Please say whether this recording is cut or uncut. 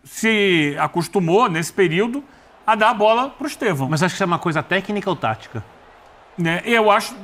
uncut